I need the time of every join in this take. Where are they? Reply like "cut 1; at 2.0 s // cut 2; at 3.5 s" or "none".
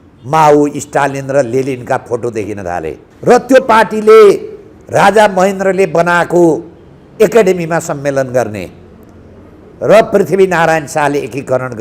cut 1; at 3.0 s